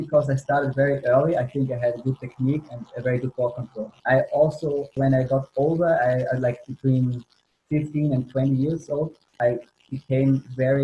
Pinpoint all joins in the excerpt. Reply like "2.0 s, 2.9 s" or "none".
3.8 s, 9.2 s